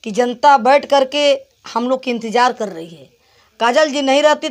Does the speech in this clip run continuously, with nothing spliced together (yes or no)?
yes